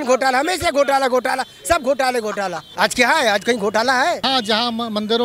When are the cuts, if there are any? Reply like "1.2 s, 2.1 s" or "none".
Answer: 2.6 s, 4.2 s